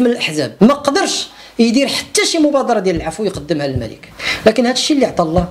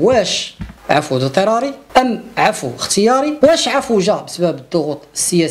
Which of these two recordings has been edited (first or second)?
second